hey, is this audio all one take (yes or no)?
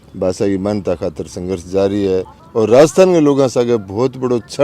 no